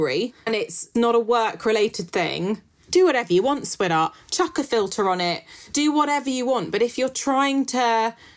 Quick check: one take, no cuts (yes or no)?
no